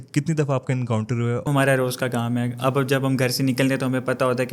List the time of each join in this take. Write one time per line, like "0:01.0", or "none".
0:01.5